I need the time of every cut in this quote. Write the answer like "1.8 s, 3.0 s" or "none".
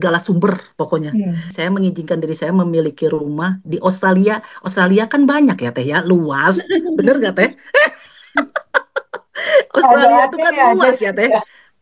1.5 s